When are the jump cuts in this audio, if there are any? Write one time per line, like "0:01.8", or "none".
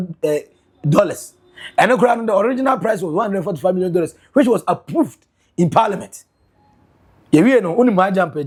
none